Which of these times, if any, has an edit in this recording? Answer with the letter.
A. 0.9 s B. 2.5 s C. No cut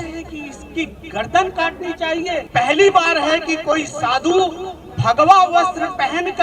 B